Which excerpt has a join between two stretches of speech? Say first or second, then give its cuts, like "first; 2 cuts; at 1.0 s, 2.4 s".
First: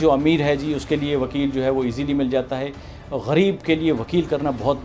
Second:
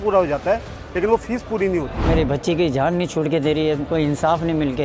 second; 2 cuts; at 2.1 s, 3.9 s